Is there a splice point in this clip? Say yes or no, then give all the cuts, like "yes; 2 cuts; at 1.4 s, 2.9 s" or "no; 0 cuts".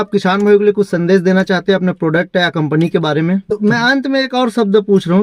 yes; 1 cut; at 3.5 s